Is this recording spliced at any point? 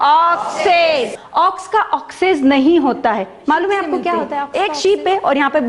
yes; 2 cuts; at 1.1 s, 4.4 s

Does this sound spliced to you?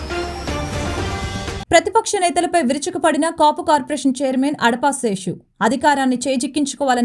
yes; 1 cut; at 1.6 s

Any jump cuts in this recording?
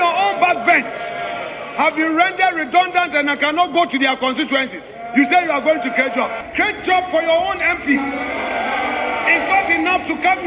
yes; 1 cut; at 6.4 s

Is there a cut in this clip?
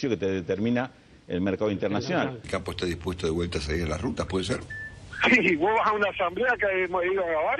yes; 1 cut; at 2.4 s

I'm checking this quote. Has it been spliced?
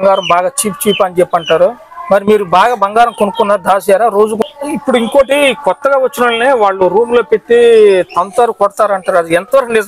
yes; 1 cut; at 4.4 s

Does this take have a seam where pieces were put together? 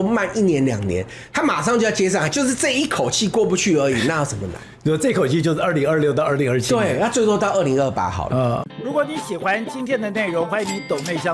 no; 0 cuts

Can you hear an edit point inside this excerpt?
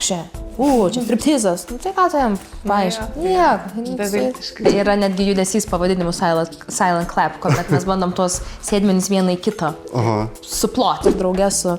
yes; 2 cuts; at 4.7 s, 11.0 s

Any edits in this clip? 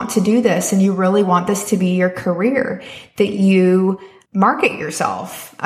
yes; 1 cut; at 4.1 s

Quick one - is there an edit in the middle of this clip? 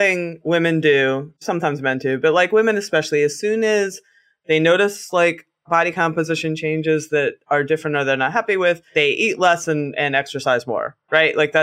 yes; 1 cut; at 1.4 s

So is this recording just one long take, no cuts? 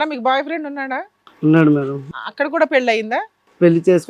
no; 1 cut; at 2.2 s

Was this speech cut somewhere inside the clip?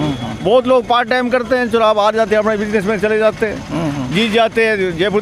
no; 0 cuts

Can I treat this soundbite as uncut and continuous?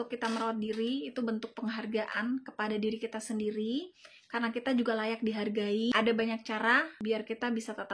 no; 2 cuts; at 5.9 s, 6.9 s

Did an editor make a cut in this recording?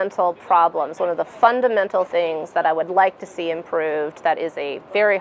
no; 0 cuts

